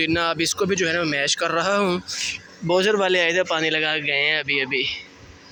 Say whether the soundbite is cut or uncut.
uncut